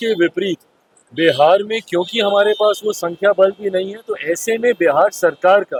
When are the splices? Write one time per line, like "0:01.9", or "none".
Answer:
none